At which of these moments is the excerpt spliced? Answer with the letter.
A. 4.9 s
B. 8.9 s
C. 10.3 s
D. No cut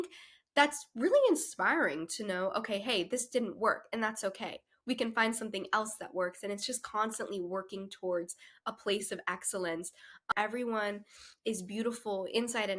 C